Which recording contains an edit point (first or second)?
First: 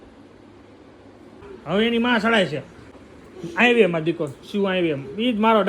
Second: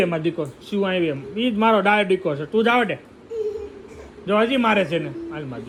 first